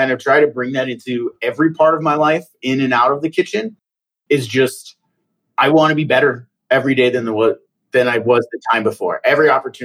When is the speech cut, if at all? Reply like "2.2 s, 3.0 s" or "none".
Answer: none

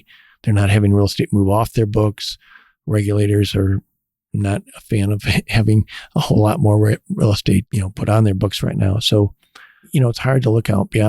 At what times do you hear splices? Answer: 7.7 s, 9.9 s

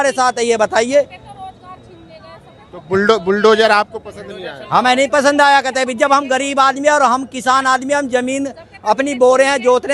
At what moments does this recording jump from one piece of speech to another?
none

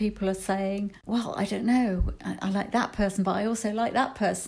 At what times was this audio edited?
1.0 s

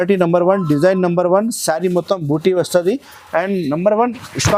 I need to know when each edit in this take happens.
none

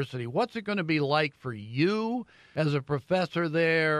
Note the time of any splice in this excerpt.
2.4 s

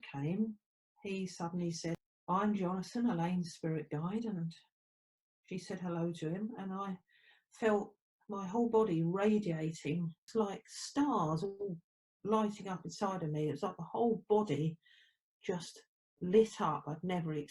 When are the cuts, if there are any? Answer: 2.0 s, 10.2 s

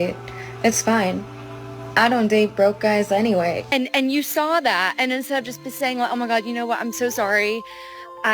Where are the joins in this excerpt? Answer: 3.6 s

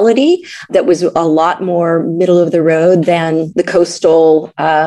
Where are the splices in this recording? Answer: 0.7 s, 3.5 s

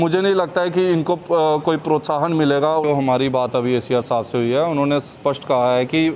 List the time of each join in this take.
2.8 s

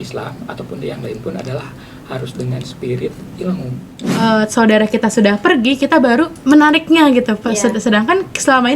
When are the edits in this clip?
4.0 s, 6.4 s

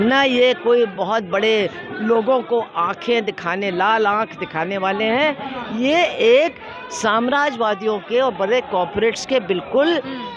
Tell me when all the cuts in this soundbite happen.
none

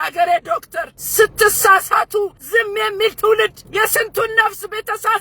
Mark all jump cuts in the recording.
1.0 s, 2.4 s, 3.6 s

